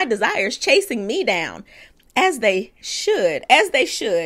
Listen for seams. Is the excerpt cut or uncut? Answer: uncut